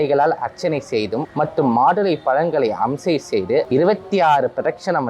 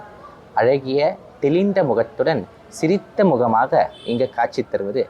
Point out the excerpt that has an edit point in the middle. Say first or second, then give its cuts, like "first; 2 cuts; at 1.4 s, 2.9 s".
first; 2 cuts; at 1.3 s, 3.7 s